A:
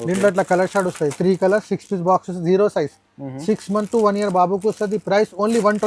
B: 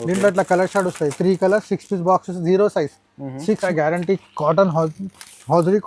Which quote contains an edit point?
B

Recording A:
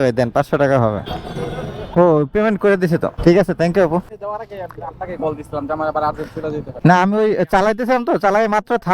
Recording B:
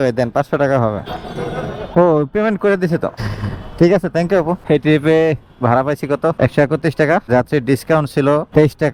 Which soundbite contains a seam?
A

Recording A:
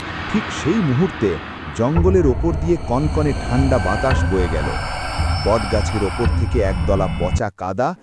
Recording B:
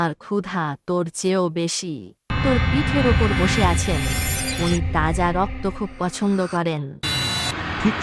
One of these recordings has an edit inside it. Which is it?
B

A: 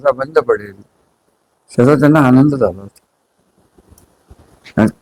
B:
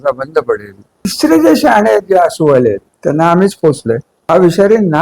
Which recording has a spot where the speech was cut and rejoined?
B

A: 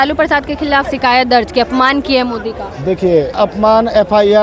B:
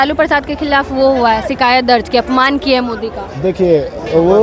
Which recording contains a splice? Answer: A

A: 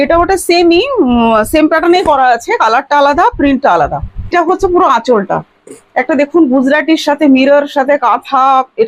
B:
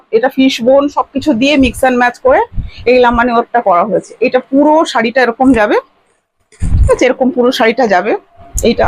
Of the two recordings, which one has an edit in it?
A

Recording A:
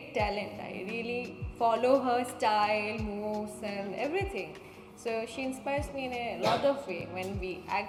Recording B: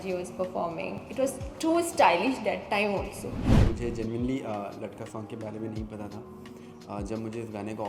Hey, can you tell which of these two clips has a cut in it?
B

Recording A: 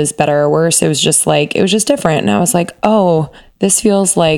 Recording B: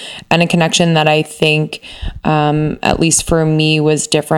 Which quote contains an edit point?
A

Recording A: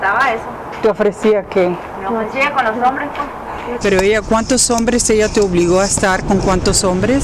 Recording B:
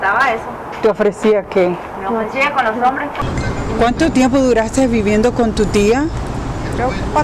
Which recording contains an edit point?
A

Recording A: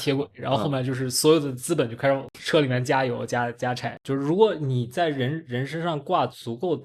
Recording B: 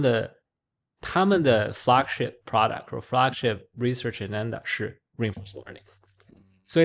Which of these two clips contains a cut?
A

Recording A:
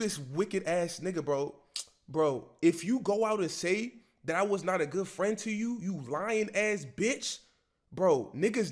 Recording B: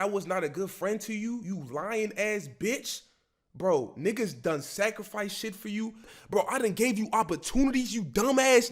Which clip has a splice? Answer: B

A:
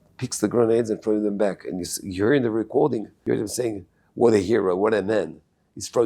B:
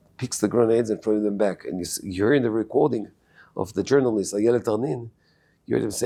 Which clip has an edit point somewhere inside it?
A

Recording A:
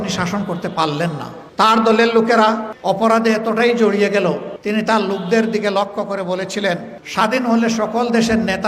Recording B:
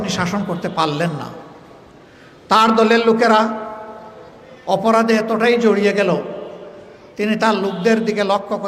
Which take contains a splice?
A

